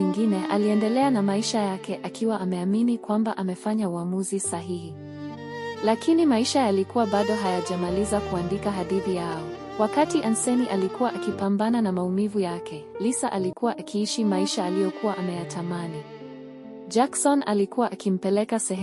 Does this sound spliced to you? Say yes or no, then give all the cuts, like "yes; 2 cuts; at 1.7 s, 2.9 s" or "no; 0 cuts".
yes; 1 cut; at 9.6 s